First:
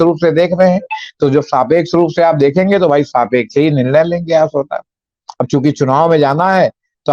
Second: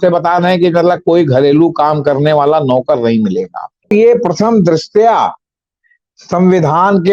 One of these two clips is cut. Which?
second; 1 cut; at 3.9 s

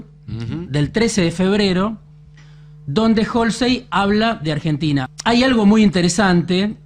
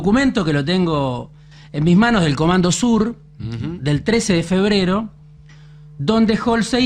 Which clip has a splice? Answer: first; 1 cut; at 5.1 s

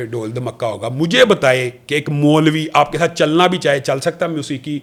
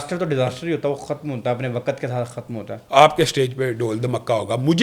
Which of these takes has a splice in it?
second; 1 cut; at 2.8 s

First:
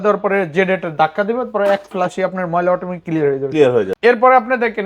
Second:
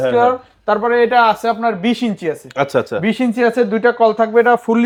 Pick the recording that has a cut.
first; 1 cut; at 3.9 s

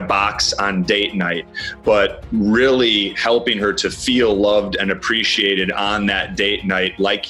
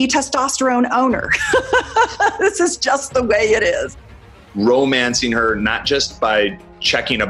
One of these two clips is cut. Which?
second; 1 cut; at 4.0 s

